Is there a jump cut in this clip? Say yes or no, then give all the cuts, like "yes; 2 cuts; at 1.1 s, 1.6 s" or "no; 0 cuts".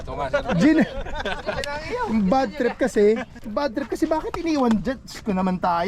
yes; 1 cut; at 3.3 s